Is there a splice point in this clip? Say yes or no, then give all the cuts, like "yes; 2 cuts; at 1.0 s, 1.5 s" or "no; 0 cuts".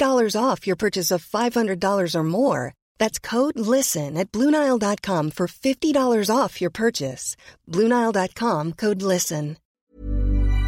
yes; 1 cut; at 9.6 s